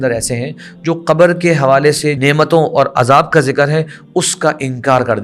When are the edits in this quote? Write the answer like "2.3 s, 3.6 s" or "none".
2.2 s